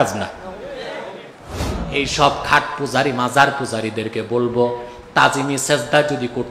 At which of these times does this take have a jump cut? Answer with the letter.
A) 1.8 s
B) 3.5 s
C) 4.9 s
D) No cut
A